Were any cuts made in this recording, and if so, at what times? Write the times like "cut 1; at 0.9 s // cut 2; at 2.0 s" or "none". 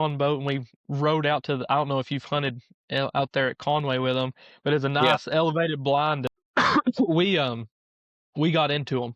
cut 1; at 6.4 s